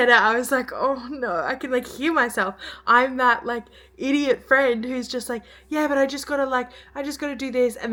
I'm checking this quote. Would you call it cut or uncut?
uncut